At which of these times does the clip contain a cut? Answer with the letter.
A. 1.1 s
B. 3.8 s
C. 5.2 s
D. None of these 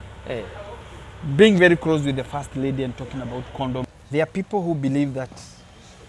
B